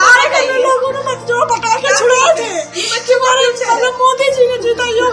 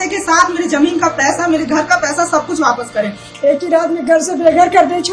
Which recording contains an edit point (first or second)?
second